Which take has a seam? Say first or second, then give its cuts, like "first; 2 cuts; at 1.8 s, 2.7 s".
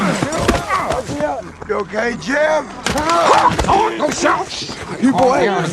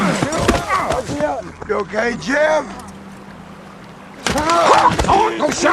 first; 1 cut; at 2.8 s